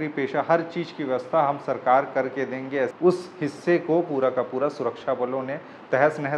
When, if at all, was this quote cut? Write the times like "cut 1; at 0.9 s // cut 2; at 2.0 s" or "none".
cut 1; at 2.9 s